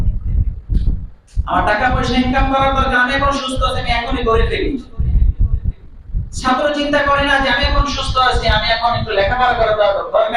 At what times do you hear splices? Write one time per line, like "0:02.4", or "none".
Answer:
none